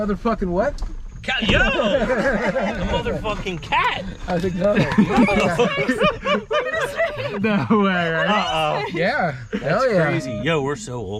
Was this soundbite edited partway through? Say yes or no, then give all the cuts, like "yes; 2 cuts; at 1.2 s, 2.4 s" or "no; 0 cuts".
no; 0 cuts